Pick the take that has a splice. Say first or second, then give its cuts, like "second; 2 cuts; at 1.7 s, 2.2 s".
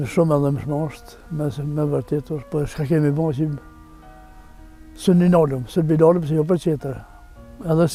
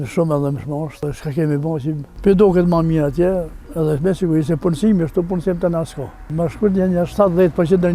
second; 4 cuts; at 1.0 s, 2.1 s, 3.6 s, 6.2 s